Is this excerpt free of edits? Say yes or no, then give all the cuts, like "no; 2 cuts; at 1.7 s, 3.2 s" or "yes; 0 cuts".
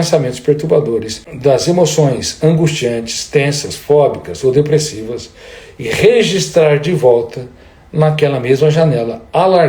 no; 1 cut; at 1.2 s